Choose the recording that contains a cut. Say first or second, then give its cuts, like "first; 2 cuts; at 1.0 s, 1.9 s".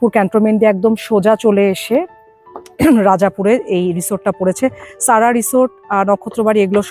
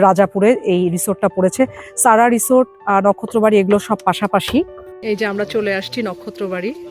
second; 1 cut; at 4.8 s